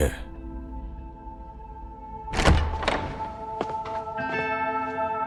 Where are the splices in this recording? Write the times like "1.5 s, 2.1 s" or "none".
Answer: none